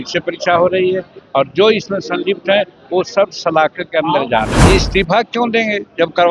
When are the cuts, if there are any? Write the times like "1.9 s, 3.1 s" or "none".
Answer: 4.5 s